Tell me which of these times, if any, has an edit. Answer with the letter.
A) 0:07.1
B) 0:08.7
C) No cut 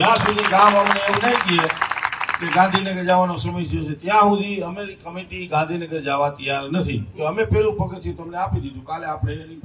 A